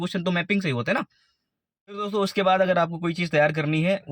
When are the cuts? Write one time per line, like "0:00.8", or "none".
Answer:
0:02.1